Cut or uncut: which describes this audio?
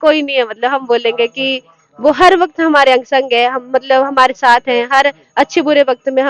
uncut